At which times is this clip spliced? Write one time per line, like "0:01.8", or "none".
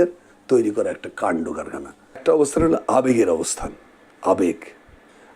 0:02.2